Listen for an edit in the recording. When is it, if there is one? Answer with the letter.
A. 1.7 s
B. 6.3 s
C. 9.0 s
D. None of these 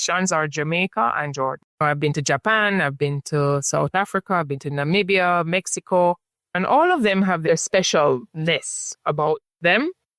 A